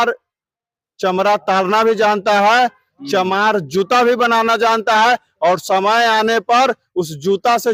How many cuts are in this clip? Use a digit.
0